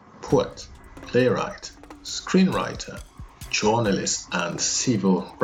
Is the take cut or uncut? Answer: uncut